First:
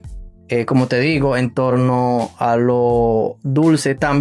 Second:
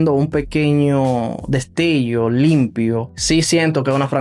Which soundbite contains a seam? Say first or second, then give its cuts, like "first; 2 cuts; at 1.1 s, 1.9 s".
second; 1 cut; at 3.1 s